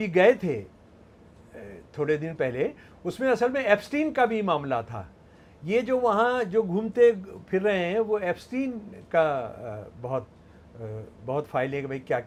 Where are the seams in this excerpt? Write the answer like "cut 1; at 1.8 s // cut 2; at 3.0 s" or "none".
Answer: none